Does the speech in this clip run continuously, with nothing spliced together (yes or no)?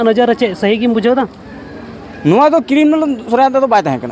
yes